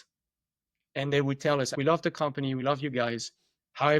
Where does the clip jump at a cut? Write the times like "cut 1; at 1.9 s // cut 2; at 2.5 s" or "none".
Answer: cut 1; at 1.7 s